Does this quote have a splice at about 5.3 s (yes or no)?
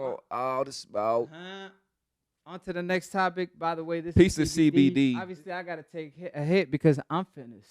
yes